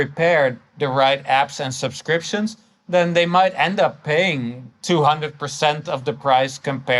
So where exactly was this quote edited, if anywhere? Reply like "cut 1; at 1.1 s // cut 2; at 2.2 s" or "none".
none